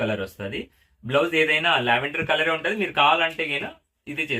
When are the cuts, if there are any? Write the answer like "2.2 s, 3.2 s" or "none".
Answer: none

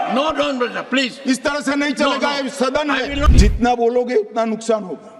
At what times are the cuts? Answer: 3.3 s

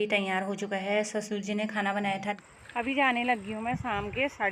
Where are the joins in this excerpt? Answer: 2.4 s

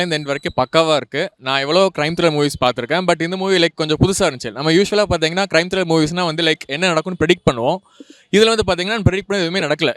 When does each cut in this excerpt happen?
none

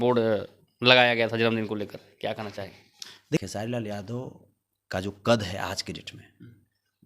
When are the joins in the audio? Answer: 3.4 s

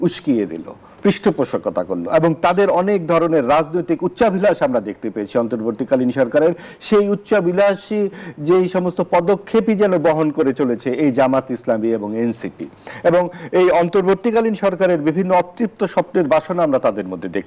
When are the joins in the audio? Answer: none

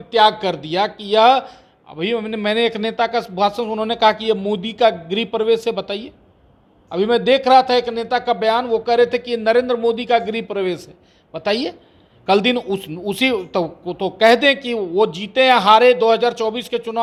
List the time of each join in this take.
none

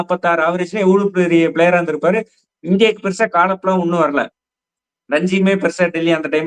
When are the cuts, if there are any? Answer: none

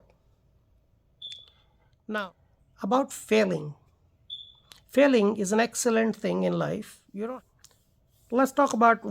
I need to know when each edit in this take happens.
2.3 s, 7.3 s

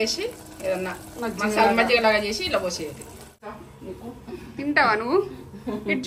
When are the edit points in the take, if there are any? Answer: 3.4 s

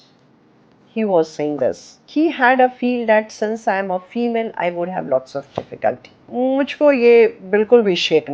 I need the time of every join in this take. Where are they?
1.9 s, 6.1 s

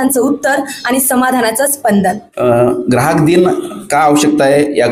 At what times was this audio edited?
2.3 s

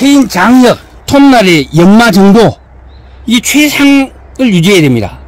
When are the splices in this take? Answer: 0.9 s

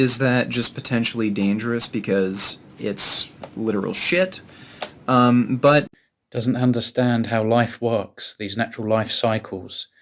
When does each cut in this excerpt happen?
none

